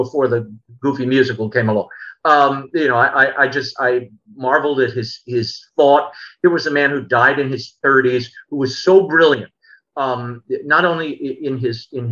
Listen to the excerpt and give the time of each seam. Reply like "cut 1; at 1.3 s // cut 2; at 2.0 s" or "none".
none